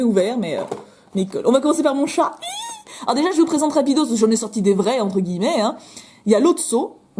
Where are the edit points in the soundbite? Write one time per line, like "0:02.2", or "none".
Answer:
0:05.5